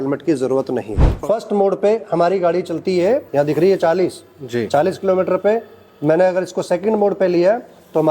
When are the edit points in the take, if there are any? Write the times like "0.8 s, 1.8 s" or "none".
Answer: 1.1 s, 3.3 s